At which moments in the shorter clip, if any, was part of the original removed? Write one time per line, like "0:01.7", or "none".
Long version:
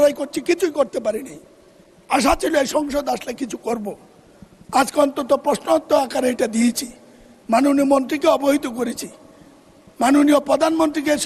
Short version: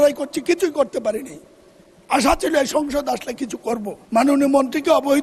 0:03.9

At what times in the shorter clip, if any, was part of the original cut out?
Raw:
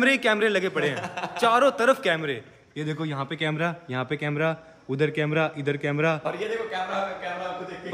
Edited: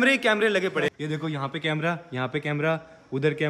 0:01.0

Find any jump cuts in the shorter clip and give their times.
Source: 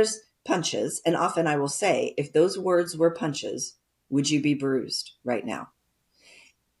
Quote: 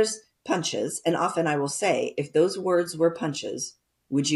none

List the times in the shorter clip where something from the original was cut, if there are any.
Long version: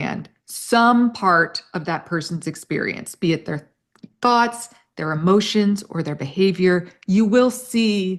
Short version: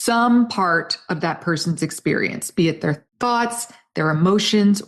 0:03.1

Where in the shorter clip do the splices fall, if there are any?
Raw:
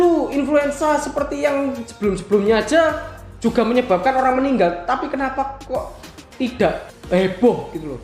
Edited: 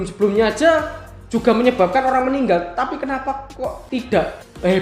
0:03.8

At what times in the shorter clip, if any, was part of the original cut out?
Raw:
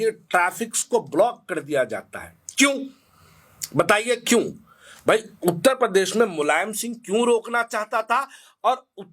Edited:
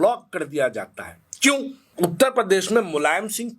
0:01.9

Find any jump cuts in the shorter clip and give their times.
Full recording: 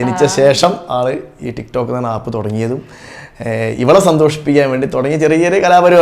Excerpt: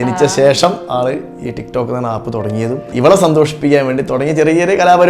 0:02.9

